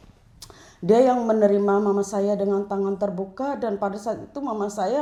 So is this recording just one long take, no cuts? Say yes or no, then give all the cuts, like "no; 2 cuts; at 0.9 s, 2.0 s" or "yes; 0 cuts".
yes; 0 cuts